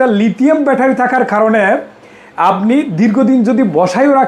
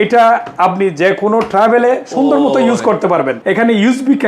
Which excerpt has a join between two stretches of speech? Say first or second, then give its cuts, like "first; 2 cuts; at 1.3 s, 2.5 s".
second; 1 cut; at 3.4 s